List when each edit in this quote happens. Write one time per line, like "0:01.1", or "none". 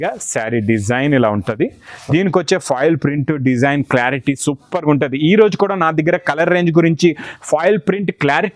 none